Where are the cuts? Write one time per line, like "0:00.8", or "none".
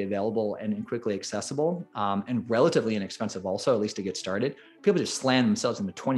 none